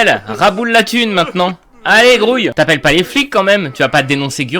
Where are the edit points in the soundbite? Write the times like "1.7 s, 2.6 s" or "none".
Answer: 2.5 s